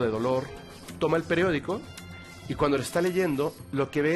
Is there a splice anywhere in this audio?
yes; 1 cut; at 0.9 s

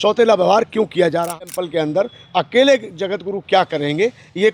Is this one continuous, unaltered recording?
no; 1 cut; at 1.4 s

